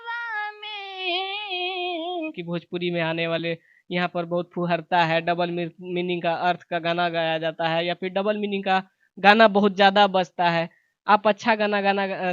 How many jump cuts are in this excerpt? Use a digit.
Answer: 1